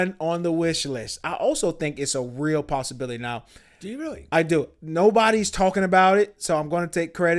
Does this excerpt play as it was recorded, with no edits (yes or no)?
no